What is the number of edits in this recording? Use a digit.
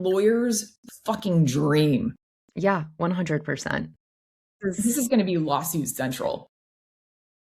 0